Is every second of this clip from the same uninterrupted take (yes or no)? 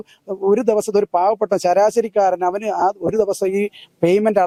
yes